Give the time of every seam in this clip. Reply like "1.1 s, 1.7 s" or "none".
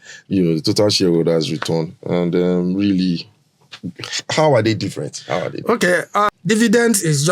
6.3 s